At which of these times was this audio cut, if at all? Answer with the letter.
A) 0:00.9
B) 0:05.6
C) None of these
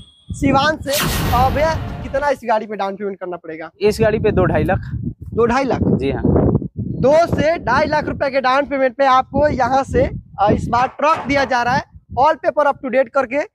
A